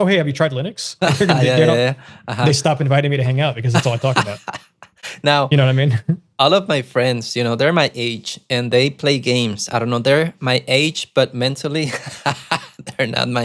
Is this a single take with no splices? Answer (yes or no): yes